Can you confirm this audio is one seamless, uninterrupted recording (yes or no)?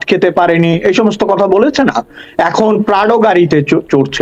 yes